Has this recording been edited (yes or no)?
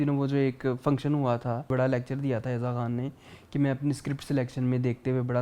yes